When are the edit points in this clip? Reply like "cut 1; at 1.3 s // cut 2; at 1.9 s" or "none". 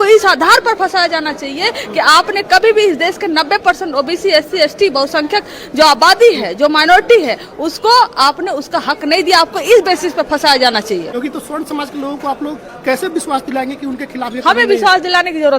cut 1; at 11.1 s